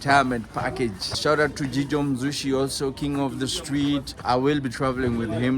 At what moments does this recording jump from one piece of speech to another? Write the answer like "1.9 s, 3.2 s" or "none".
1.1 s, 4.2 s